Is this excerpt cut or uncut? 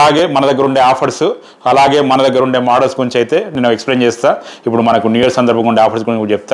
uncut